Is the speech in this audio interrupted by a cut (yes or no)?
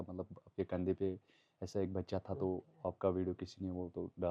no